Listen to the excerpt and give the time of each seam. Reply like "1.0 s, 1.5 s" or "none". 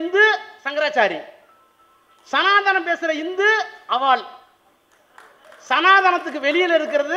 none